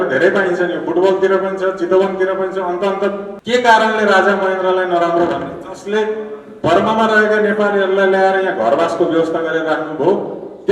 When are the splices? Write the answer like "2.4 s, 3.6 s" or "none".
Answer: 3.3 s